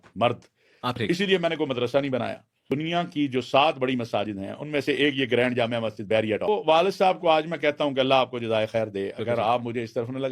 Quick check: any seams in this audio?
yes; 3 cuts; at 1.0 s, 2.6 s, 6.5 s

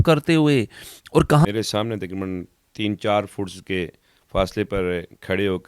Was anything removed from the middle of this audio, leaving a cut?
yes; 1 cut; at 1.5 s

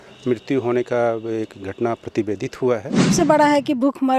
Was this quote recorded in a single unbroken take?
no; 1 cut; at 3.1 s

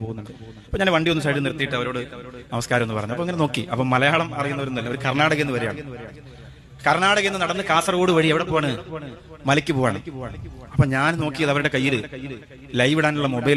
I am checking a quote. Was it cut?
no; 0 cuts

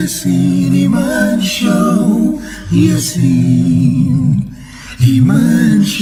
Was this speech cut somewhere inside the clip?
no; 0 cuts

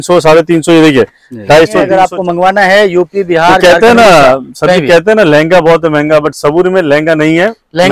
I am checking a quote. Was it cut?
yes; 1 cut; at 1.9 s

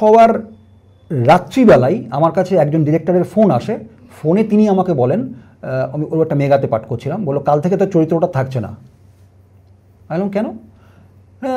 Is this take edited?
no; 0 cuts

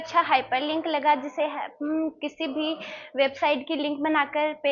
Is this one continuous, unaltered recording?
yes; 0 cuts

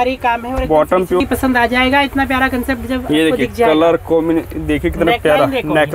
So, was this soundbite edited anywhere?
yes; 1 cut; at 1.2 s

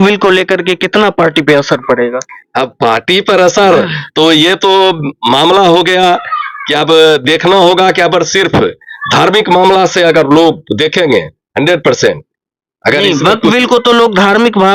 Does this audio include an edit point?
no; 0 cuts

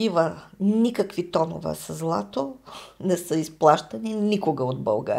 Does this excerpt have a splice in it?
no; 0 cuts

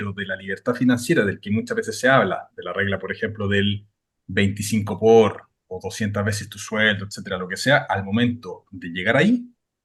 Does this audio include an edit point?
no; 0 cuts

